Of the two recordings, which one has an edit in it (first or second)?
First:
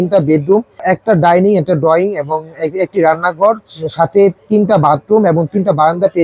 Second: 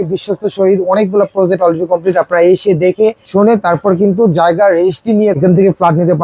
second